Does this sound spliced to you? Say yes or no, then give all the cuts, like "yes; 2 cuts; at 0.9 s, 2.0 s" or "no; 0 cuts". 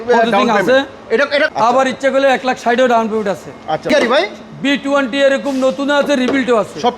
yes; 2 cuts; at 1.5 s, 3.9 s